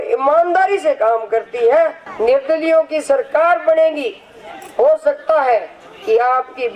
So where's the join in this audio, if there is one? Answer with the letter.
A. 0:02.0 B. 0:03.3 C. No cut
A